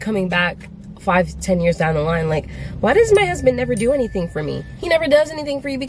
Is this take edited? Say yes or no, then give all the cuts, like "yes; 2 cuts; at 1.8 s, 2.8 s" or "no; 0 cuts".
no; 0 cuts